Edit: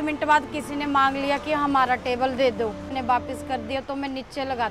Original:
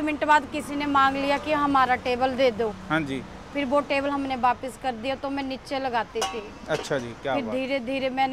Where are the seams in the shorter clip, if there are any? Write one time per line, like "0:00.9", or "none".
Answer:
0:02.9